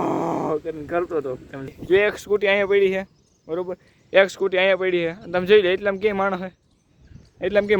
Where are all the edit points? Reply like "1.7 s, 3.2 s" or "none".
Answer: 1.7 s